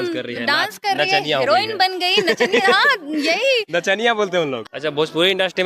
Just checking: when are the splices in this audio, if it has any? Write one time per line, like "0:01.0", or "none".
0:04.7